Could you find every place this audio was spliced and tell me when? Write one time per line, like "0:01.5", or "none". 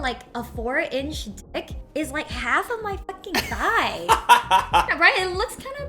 0:04.9